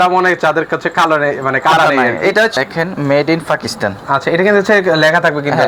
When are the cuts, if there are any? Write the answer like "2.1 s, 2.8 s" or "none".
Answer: 2.5 s